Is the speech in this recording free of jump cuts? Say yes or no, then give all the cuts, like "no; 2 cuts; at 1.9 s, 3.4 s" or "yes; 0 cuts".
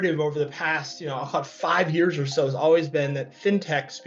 yes; 0 cuts